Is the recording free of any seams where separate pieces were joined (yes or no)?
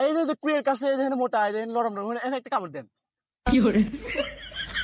yes